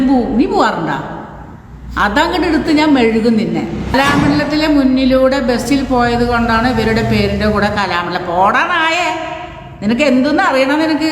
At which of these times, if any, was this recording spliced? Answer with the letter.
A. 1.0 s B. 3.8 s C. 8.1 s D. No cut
B